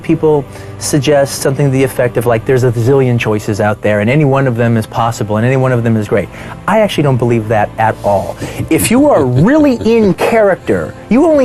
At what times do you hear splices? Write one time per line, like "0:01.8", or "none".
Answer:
none